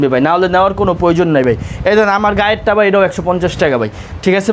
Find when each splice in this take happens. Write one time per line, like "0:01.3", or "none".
none